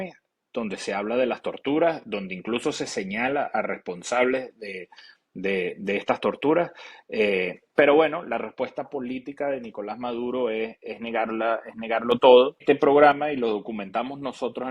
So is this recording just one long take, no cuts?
no; 1 cut; at 12.6 s

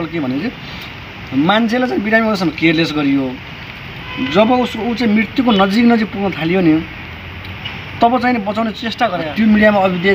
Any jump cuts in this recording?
yes; 1 cut; at 9.2 s

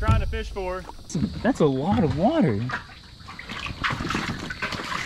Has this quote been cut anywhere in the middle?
yes; 1 cut; at 0.9 s

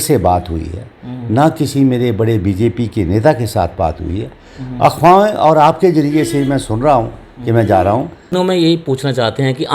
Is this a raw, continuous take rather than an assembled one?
no; 1 cut; at 8.3 s

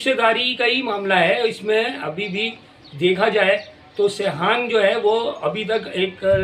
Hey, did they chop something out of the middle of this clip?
no; 0 cuts

